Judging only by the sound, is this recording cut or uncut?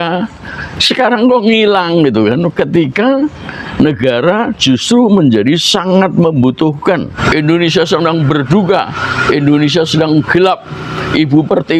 cut